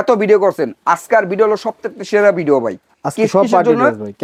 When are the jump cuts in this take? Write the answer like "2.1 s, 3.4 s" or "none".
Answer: none